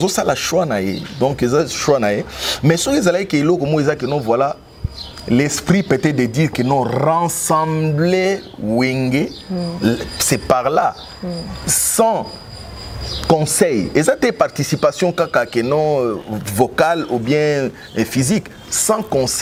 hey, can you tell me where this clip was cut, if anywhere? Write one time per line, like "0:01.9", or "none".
none